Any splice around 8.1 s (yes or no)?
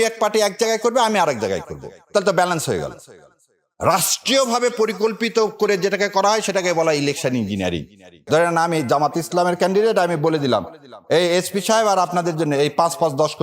yes